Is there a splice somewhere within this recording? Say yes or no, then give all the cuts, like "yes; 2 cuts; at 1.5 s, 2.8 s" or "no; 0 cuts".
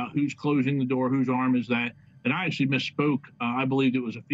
no; 0 cuts